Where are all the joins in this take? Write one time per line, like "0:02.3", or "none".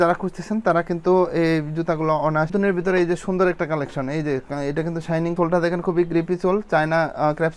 0:02.5